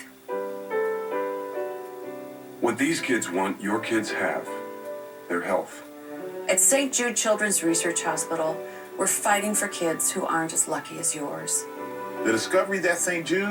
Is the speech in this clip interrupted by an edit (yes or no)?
no